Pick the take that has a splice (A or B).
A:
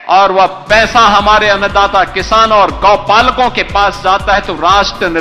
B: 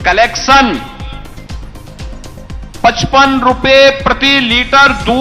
B